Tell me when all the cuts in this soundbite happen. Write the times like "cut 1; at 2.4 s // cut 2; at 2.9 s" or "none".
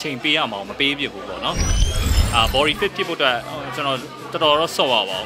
cut 1; at 1.9 s